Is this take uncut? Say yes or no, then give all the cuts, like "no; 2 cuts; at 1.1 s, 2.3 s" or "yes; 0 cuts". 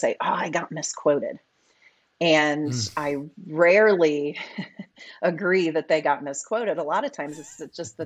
yes; 0 cuts